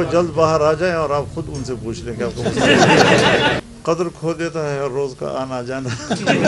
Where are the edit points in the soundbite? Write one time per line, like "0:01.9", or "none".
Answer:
0:03.6